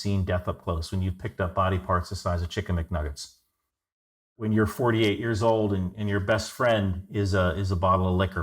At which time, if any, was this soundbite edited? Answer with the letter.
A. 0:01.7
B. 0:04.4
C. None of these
B